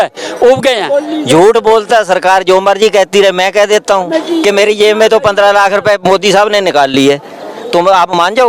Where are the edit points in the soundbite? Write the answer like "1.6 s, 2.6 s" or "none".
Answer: 1.0 s